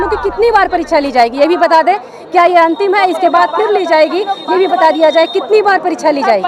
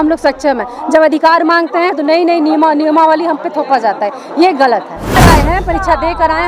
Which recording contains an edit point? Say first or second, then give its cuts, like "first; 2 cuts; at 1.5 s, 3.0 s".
second; 1 cut; at 5.2 s